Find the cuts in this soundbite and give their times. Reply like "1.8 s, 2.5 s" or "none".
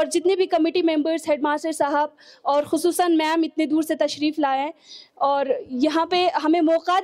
none